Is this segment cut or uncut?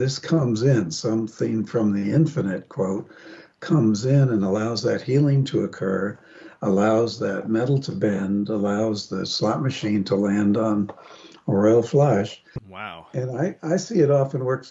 cut